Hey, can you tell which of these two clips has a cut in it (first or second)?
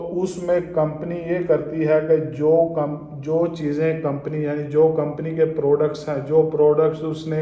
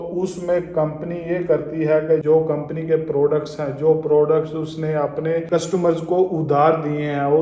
second